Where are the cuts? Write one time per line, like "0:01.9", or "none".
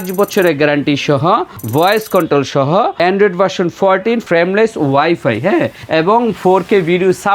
0:01.6
0:02.9
0:04.2
0:05.8